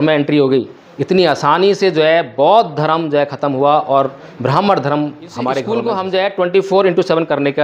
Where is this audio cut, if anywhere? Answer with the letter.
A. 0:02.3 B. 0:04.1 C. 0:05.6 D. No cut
C